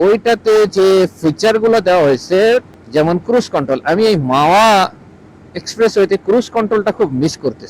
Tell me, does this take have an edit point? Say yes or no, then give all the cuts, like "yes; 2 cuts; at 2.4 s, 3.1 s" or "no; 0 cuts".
yes; 1 cut; at 2.8 s